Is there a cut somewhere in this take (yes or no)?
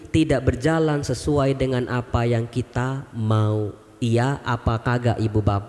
no